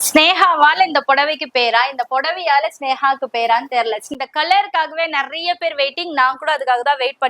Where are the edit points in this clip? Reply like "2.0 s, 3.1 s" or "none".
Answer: 4.1 s